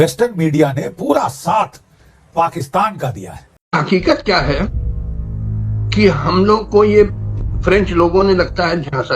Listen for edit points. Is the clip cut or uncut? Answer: cut